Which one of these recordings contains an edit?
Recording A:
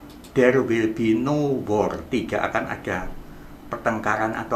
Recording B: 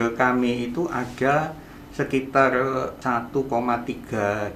B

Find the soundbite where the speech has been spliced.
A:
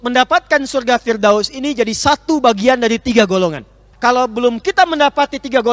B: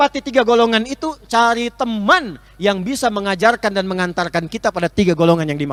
A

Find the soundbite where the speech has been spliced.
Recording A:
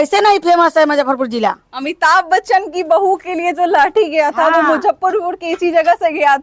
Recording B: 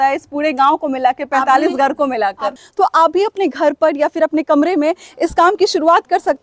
B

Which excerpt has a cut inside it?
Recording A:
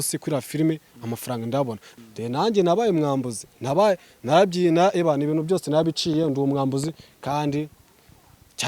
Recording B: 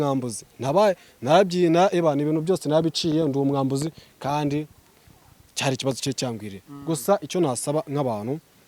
A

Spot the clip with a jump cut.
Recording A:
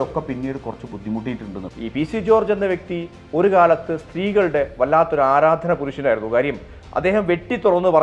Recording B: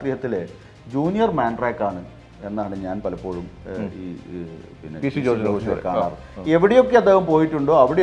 A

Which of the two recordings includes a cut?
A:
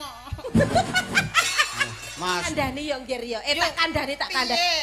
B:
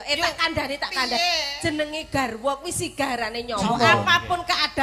A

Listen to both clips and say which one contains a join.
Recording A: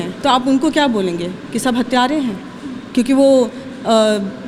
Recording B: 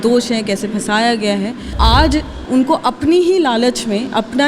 B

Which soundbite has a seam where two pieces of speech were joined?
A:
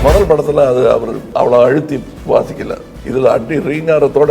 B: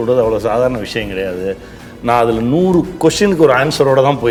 A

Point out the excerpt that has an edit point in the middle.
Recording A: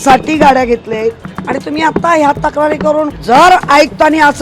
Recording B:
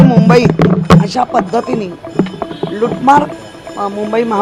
A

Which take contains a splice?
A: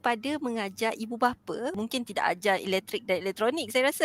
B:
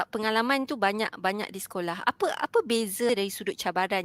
B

